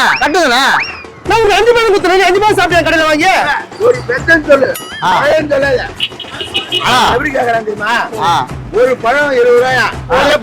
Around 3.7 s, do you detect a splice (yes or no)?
yes